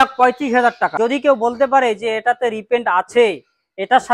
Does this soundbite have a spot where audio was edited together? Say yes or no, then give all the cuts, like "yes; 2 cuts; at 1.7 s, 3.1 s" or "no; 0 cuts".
yes; 1 cut; at 0.9 s